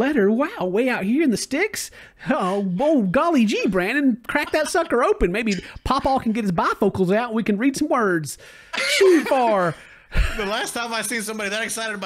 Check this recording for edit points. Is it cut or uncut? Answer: uncut